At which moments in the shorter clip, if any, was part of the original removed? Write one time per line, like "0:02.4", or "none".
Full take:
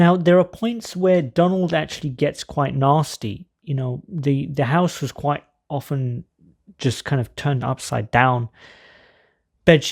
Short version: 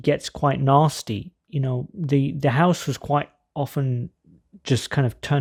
none